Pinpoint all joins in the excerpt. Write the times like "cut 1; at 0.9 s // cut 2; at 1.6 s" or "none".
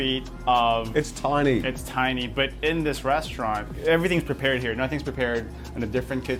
none